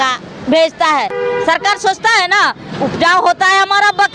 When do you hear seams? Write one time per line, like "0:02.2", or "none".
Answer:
0:01.1